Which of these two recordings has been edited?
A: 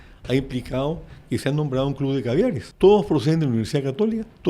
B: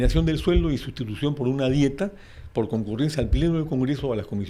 A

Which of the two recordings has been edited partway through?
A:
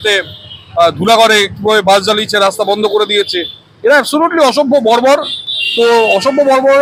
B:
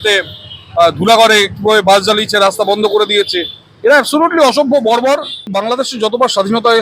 B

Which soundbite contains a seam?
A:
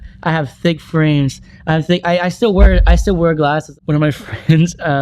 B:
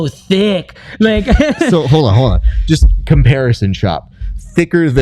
A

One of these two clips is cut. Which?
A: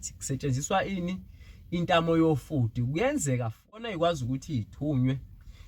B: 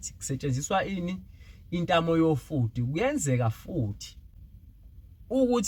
A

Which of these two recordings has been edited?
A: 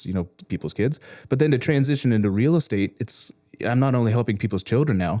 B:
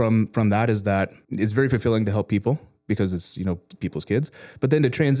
B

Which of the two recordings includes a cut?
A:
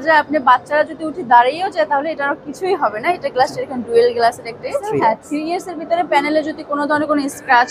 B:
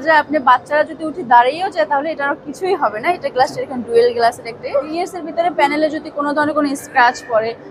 B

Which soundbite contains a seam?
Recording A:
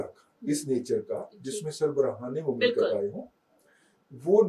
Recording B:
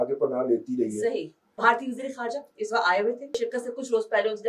B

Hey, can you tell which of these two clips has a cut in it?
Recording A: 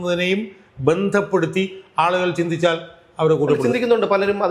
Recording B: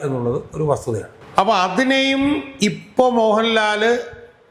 B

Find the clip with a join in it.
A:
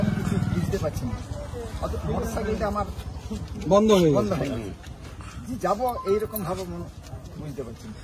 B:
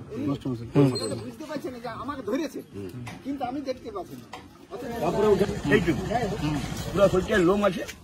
B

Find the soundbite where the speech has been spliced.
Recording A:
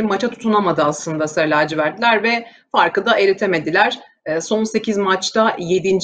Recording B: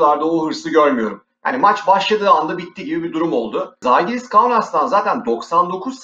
B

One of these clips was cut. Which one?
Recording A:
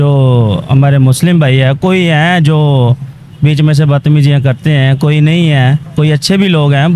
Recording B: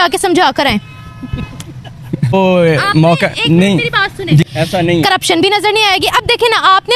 B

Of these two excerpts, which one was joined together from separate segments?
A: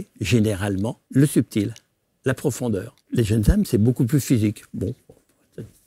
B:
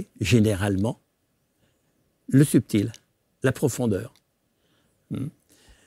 A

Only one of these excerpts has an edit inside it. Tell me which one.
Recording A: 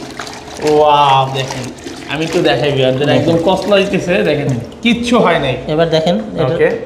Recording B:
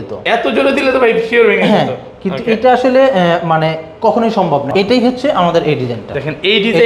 B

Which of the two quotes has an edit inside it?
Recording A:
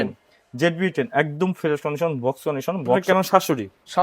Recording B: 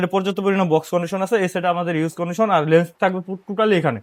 A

